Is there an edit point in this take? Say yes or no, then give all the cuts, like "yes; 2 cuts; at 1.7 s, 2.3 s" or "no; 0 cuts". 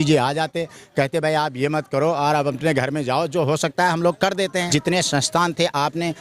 yes; 1 cut; at 4.7 s